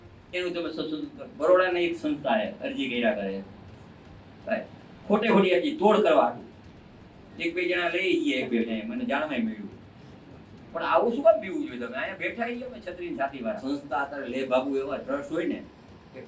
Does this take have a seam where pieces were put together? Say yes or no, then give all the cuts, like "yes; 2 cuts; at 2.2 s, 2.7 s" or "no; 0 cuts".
yes; 2 cuts; at 1.2 s, 13.6 s